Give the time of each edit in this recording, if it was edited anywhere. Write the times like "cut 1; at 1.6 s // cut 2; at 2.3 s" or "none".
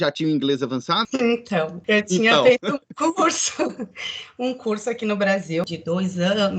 cut 1; at 1.1 s // cut 2; at 1.8 s // cut 3; at 5.7 s